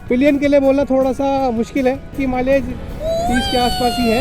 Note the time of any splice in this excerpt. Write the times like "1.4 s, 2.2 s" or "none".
2.1 s